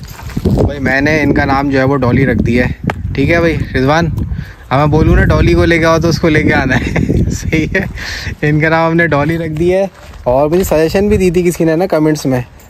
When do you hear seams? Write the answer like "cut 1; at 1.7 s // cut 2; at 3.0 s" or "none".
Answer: none